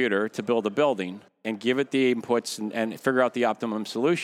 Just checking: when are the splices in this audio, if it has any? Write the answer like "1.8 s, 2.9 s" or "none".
none

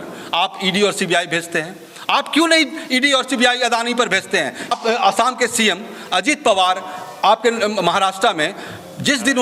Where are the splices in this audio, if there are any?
4.8 s

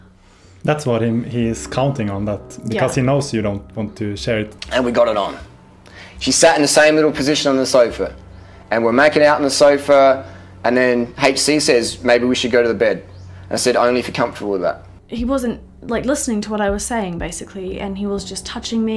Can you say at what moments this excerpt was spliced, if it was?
4.6 s, 14.9 s

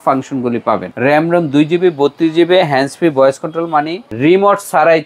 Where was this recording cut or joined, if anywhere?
0.9 s, 4.0 s

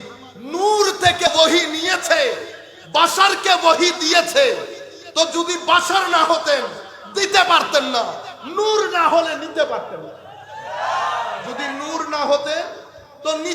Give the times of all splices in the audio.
1.3 s

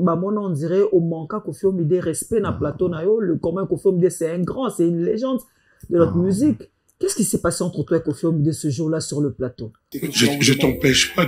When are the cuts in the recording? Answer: 9.8 s

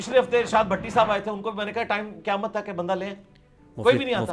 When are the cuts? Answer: none

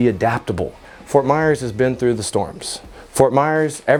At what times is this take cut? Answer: none

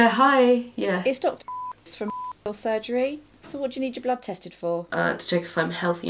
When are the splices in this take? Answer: 1.0 s, 3.4 s, 4.8 s

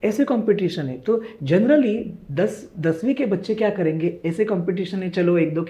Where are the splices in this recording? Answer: none

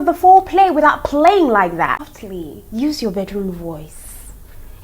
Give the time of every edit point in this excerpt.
2.0 s

